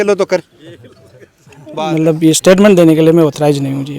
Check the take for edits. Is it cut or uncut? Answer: cut